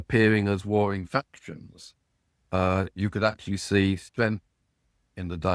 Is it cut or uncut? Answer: uncut